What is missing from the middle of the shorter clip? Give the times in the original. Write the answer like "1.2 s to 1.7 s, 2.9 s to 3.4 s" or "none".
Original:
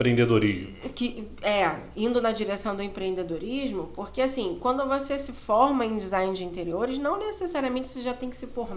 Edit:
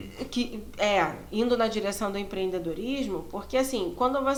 none